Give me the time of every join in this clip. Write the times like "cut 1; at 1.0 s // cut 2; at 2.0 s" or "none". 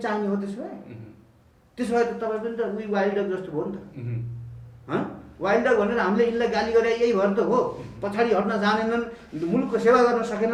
none

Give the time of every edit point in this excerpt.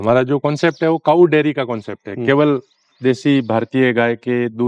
none

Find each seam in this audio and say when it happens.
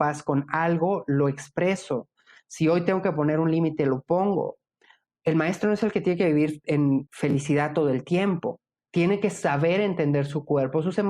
cut 1; at 8.8 s

